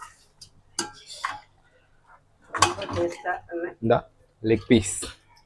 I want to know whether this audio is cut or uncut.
uncut